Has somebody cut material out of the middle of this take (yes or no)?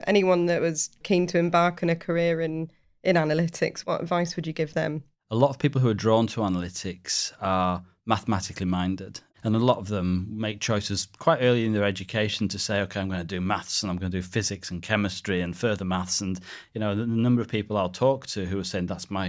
yes